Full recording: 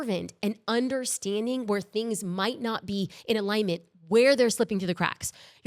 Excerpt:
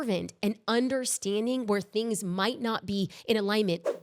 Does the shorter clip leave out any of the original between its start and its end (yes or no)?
no